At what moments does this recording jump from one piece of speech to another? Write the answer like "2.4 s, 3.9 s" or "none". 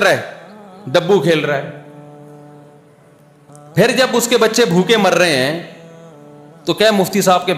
none